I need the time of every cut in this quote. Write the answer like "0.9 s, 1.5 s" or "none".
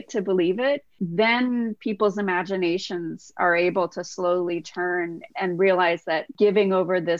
1.0 s, 5.2 s, 6.3 s